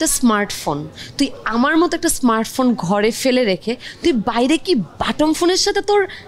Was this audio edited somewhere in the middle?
no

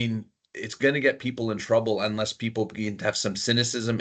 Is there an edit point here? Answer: no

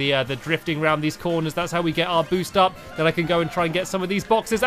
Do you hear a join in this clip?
no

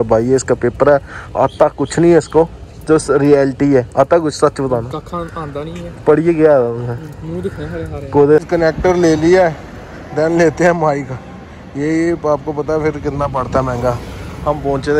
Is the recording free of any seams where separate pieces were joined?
no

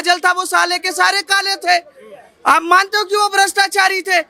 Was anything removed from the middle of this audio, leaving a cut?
no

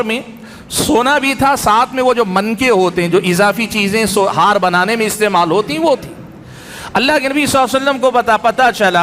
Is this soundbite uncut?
yes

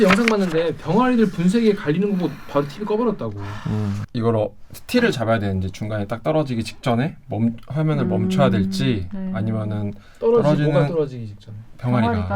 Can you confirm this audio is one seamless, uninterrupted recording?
no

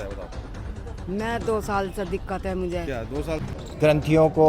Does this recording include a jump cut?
yes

